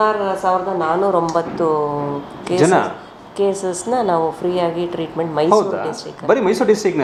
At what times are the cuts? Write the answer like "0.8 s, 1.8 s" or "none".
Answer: none